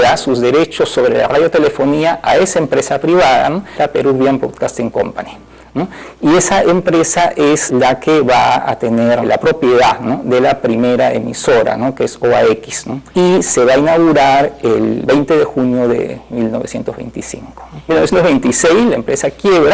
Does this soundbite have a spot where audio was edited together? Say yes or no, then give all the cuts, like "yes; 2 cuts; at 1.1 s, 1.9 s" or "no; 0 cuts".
no; 0 cuts